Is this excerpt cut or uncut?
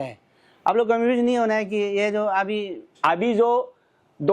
cut